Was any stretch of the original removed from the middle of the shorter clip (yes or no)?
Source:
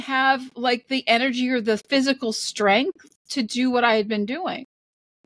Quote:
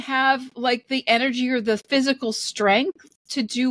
no